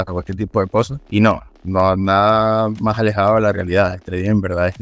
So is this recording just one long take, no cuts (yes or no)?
no